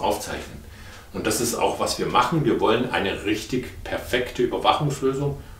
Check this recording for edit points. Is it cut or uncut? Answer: uncut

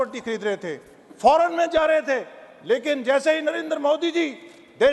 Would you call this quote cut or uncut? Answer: uncut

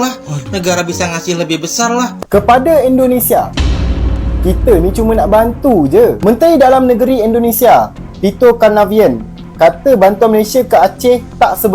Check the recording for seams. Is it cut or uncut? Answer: cut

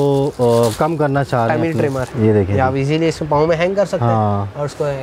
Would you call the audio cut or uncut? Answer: cut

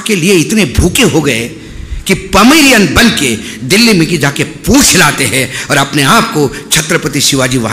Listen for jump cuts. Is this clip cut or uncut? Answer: uncut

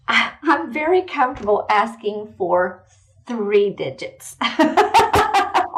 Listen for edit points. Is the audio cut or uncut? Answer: uncut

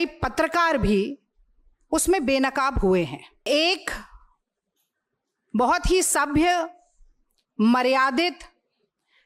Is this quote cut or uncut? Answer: cut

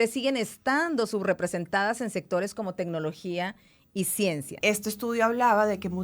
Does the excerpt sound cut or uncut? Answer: cut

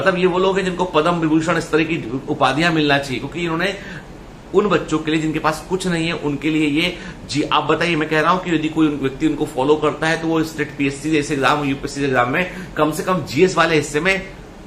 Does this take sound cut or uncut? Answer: uncut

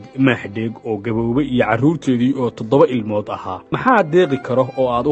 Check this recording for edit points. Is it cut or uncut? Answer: uncut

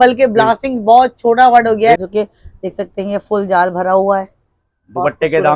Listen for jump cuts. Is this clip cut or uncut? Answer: cut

